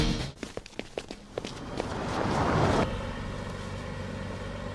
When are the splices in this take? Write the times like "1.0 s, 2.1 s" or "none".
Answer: 2.8 s